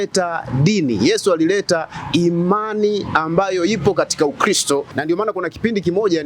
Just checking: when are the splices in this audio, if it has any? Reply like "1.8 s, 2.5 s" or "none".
4.9 s

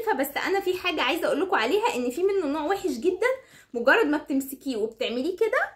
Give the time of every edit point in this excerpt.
none

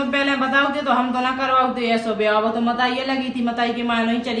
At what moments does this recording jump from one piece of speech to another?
none

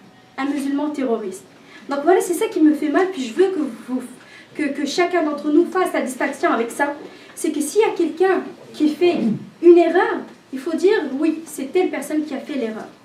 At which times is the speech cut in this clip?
none

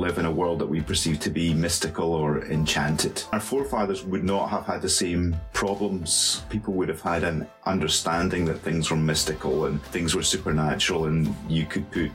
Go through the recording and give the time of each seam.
3.3 s, 6.5 s, 9.8 s

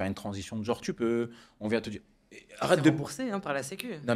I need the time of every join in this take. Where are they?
none

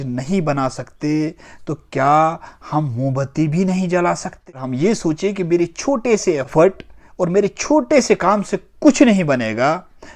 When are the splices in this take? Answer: 4.7 s

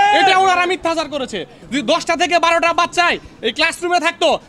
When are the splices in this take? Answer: 1.5 s

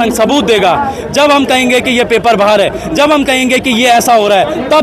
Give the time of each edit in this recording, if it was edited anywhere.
none

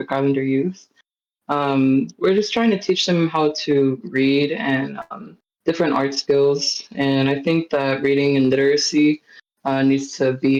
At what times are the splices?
none

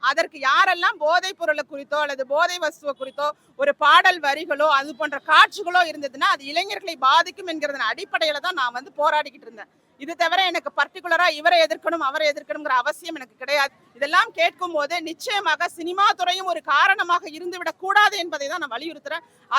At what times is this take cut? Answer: 13.8 s

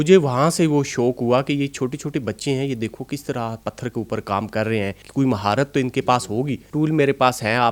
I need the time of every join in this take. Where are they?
5.0 s, 6.6 s

